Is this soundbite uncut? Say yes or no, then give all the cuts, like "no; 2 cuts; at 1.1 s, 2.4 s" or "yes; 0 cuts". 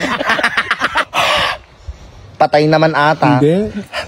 no; 1 cut; at 1.1 s